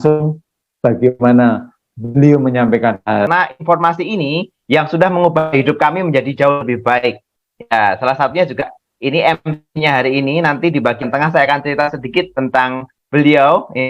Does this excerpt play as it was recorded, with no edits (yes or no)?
no